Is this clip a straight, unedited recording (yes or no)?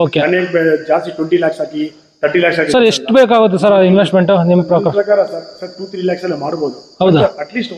yes